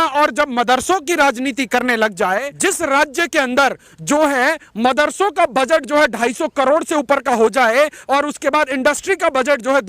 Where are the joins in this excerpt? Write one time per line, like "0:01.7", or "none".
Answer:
0:02.5